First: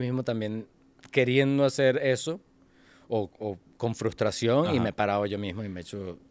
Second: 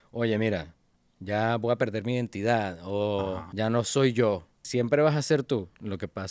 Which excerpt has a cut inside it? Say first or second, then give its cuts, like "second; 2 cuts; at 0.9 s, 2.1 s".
second; 2 cuts; at 3.4 s, 4.5 s